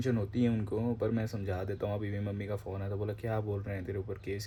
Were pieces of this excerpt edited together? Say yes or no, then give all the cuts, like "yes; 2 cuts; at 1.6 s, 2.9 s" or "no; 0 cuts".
no; 0 cuts